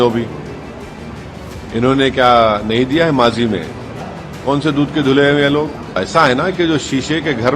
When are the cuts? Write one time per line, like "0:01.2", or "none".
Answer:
0:06.0

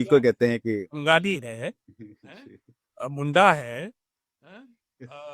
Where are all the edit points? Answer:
none

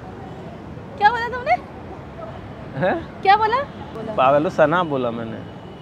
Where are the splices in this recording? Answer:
0:04.0

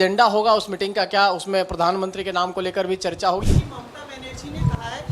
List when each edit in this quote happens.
0:03.4

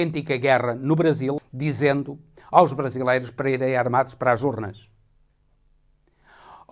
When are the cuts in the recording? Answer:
0:01.4

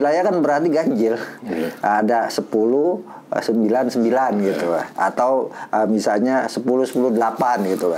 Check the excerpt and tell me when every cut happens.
none

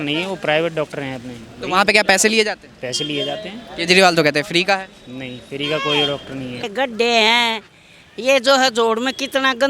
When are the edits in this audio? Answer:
0:06.7

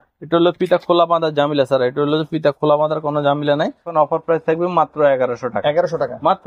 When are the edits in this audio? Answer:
0:03.9

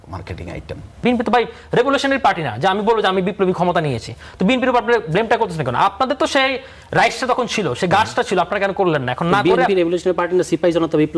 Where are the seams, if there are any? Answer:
0:01.0

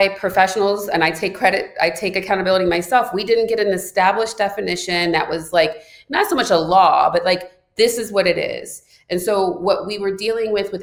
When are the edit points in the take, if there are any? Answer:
none

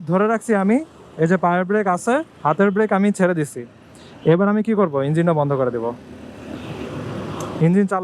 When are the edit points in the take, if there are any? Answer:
none

